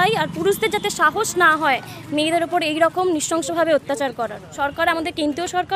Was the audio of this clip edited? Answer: yes; 1 cut; at 4.5 s

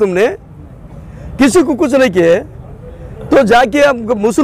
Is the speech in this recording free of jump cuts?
yes; 0 cuts

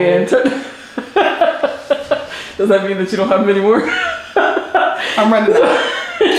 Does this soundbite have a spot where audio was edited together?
no; 0 cuts

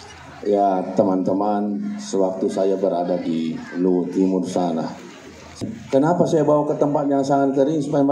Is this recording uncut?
no; 1 cut; at 5.6 s

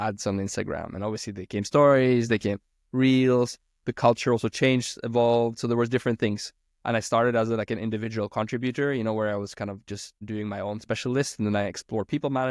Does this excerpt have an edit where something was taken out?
no; 0 cuts

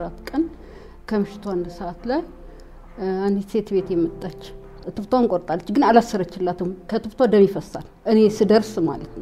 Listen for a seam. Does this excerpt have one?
yes; 1 cut; at 4.9 s

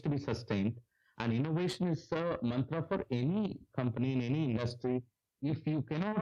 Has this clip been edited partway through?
yes; 1 cut; at 5.2 s

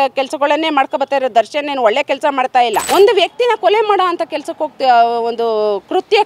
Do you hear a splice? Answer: yes; 1 cut; at 2.8 s

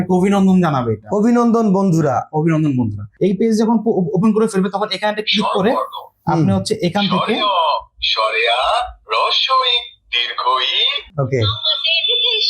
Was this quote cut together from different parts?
yes; 2 cuts; at 3.0 s, 11.0 s

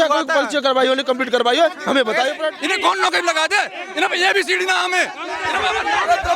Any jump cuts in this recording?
yes; 1 cut; at 2.6 s

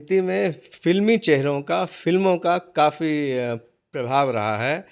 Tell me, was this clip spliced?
no; 0 cuts

